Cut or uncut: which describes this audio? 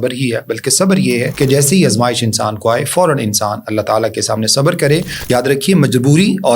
cut